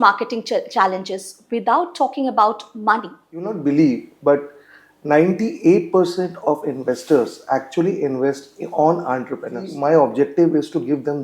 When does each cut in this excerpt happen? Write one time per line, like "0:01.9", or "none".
0:03.5
0:09.7

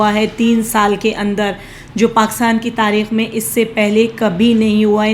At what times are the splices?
none

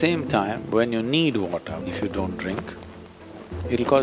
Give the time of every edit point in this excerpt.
0:01.8

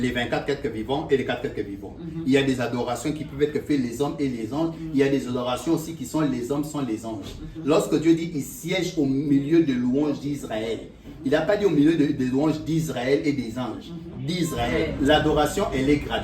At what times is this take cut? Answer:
0:14.9

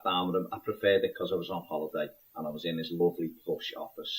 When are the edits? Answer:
0:01.9

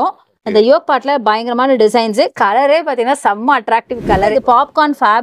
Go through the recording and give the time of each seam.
0:04.3

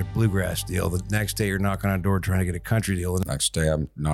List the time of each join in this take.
0:03.2

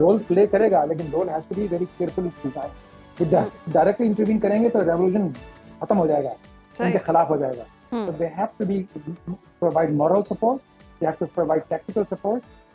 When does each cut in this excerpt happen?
none

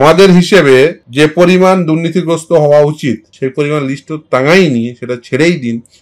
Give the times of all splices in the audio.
0:01.0
0:03.3

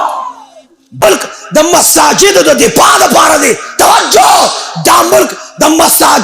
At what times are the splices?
0:01.0

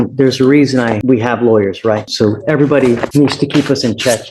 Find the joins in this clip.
0:01.0
0:02.1
0:03.1

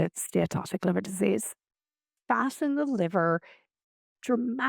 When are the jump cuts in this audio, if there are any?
0:02.1

